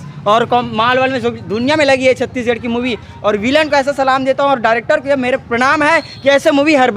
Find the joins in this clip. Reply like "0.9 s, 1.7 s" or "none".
none